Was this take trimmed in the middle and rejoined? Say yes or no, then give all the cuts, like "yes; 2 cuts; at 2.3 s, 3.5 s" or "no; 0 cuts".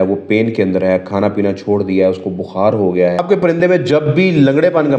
yes; 1 cut; at 3.2 s